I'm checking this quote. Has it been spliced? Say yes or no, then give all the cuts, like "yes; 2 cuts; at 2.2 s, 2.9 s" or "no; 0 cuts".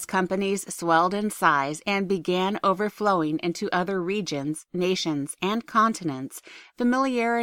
yes; 1 cut; at 3.0 s